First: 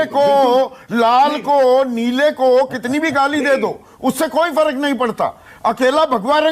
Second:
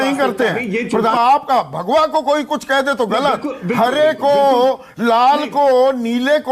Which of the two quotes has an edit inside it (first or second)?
second